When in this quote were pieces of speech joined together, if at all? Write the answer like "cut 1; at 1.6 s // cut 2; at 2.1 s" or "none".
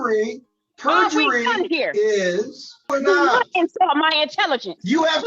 cut 1; at 2.9 s